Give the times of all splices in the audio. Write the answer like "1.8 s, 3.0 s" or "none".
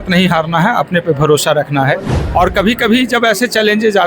2.1 s